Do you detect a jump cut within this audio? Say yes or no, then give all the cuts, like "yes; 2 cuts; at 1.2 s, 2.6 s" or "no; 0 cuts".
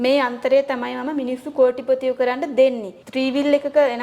no; 0 cuts